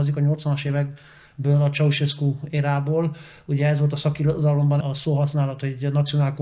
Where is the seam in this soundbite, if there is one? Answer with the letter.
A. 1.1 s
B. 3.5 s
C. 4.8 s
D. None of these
C